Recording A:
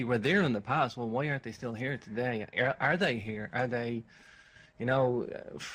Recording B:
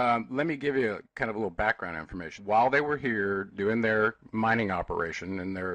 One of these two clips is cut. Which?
B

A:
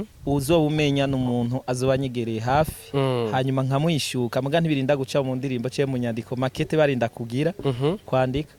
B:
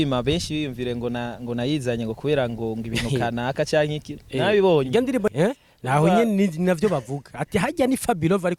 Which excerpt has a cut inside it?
B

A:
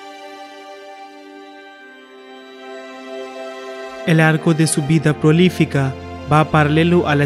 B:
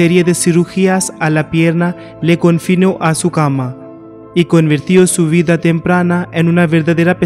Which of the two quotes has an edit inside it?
A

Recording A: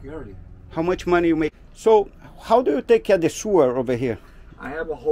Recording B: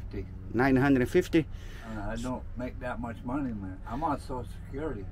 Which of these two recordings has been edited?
A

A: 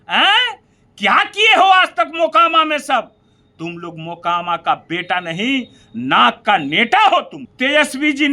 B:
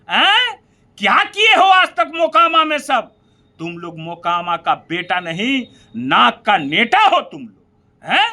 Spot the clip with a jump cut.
A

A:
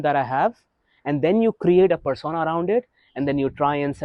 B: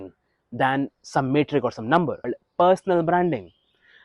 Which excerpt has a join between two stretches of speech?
B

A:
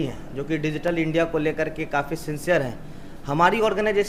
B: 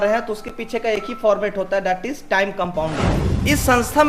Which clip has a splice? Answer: B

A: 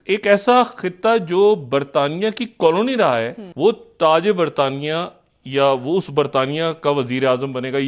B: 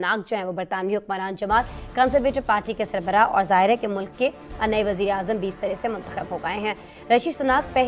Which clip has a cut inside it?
A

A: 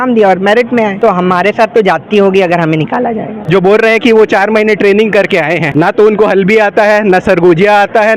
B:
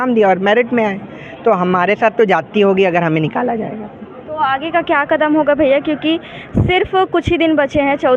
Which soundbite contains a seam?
A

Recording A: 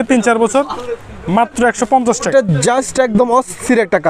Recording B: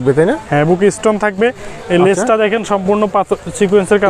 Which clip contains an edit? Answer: A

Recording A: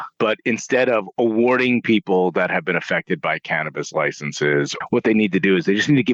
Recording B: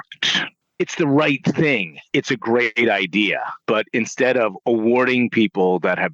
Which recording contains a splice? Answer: A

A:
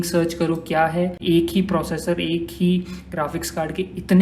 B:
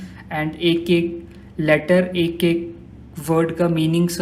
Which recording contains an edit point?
A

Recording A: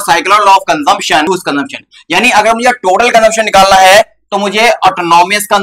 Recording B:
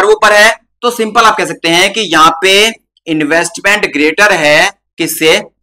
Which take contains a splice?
A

